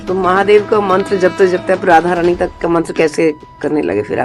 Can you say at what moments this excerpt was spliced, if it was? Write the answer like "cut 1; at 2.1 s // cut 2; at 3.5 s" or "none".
none